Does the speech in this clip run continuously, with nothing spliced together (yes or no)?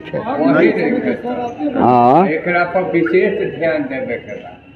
yes